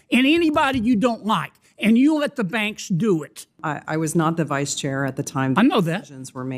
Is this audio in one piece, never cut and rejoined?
no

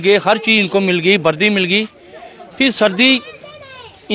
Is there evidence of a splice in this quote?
no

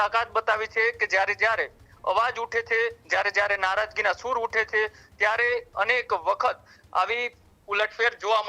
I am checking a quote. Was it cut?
no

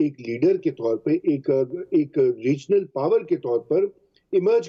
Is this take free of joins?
yes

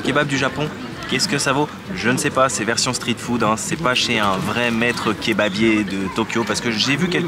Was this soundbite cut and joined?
no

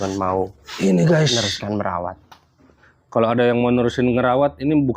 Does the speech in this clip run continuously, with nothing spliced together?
yes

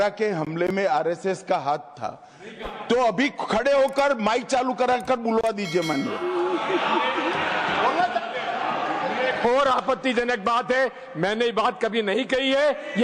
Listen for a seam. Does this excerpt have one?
no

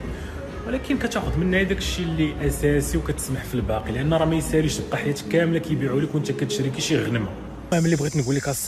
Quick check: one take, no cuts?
no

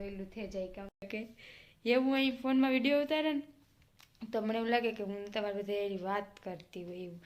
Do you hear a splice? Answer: yes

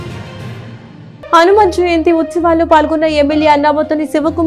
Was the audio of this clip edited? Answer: yes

